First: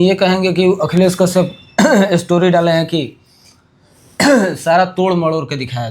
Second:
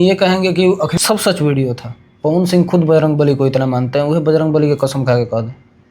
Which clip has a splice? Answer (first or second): second